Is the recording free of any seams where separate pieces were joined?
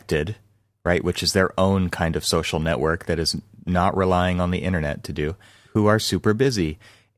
no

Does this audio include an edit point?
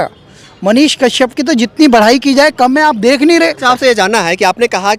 no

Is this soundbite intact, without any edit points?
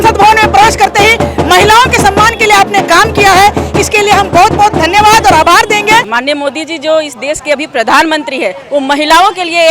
no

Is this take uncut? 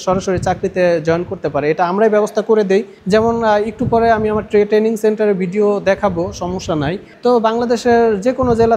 yes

